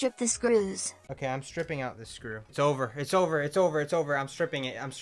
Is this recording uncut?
no; 2 cuts; at 0.9 s, 2.4 s

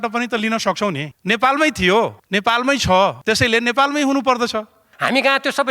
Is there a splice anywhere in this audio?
yes; 4 cuts; at 1.1 s, 2.2 s, 3.2 s, 4.8 s

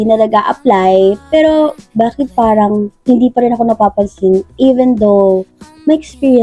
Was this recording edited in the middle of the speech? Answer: no; 0 cuts

